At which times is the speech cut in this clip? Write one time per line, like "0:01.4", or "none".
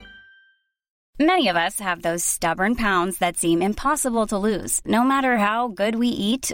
0:01.0